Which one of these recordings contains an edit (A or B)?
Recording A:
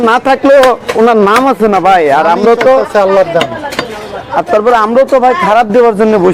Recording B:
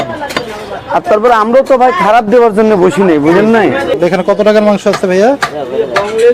B